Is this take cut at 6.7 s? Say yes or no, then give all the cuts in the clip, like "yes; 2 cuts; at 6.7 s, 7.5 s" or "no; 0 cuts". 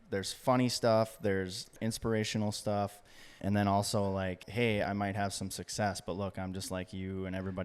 no; 3 cuts; at 1.7 s, 3.4 s, 4.5 s